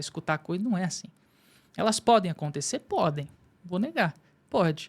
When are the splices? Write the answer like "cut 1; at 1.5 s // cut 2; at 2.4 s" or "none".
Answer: cut 1; at 1.6 s